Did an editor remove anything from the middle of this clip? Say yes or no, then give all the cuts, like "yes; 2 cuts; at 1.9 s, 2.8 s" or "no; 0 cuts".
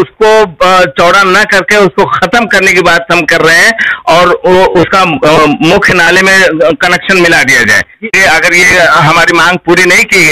yes; 1 cut; at 8.2 s